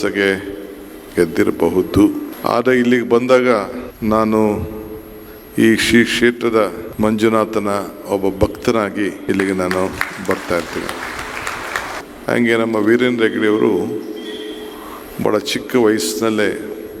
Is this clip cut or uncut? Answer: cut